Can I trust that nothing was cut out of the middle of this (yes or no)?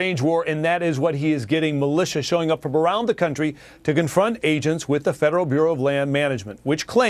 yes